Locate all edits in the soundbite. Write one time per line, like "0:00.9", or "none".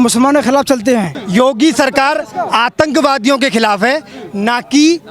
0:01.1